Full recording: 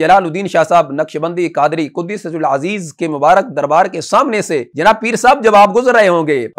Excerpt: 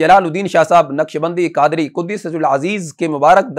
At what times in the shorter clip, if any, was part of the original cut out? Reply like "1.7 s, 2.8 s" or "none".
none